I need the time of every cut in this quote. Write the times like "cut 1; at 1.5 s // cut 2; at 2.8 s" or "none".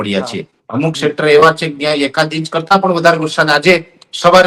none